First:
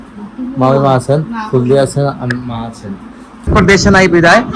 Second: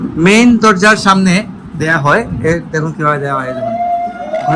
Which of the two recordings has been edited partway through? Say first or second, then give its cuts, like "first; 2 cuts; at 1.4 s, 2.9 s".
first; 1 cut; at 3.5 s